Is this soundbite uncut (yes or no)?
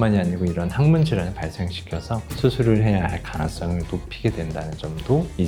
yes